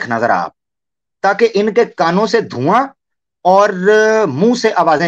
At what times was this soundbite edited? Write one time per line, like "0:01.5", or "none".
none